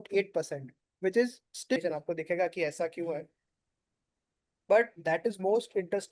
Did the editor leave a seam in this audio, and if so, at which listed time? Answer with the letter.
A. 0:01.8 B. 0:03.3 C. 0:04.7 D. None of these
A